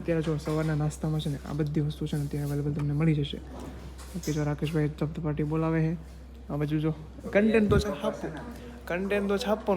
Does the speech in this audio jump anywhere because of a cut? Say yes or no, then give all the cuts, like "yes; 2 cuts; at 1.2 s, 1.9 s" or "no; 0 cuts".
no; 0 cuts